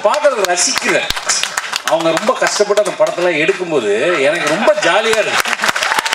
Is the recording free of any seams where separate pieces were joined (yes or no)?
yes